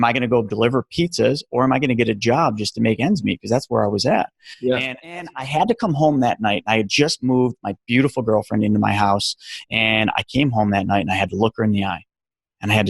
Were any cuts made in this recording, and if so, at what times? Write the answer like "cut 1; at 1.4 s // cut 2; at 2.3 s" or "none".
cut 1; at 5.3 s